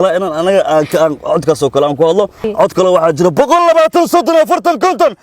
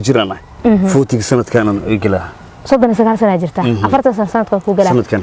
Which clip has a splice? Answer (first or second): first